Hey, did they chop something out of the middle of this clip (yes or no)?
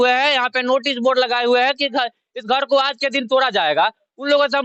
no